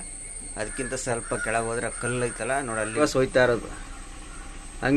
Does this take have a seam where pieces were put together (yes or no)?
yes